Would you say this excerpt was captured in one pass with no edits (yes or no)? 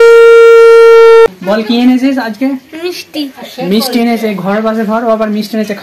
no